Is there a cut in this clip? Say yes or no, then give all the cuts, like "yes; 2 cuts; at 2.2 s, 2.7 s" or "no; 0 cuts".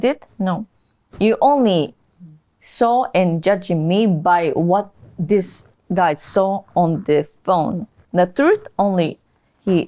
yes; 1 cut; at 7.9 s